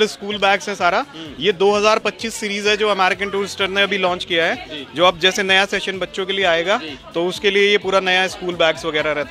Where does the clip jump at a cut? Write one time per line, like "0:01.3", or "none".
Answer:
none